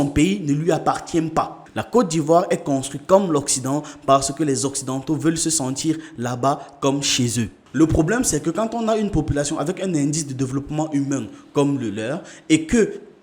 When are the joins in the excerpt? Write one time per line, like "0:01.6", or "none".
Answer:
0:01.6
0:07.6